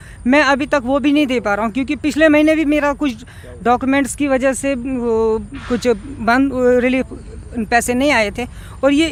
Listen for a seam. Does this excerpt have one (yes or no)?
no